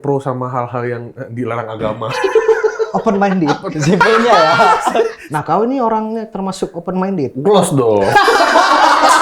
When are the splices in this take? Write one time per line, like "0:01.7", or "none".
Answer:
0:05.2